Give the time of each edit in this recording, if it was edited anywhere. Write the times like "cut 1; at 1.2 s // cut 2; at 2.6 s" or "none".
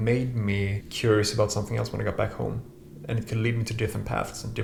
none